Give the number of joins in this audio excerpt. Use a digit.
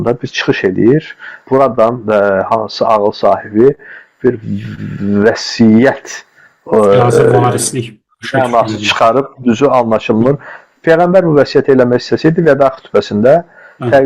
1